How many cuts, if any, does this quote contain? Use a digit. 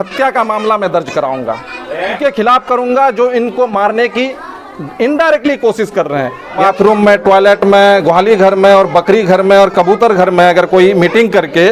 2